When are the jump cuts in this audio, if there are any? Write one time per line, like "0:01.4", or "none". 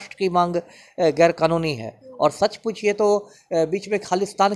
none